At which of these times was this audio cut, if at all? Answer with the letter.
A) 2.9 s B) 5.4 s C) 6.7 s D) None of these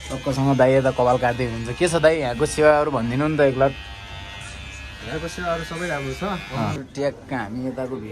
C